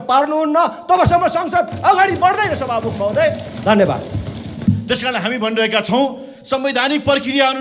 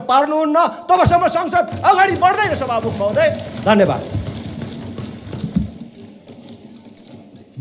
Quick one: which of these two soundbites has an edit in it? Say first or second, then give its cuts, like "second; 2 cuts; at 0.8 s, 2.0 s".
first; 1 cut; at 4.6 s